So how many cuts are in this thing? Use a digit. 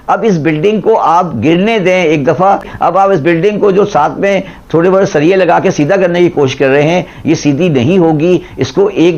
1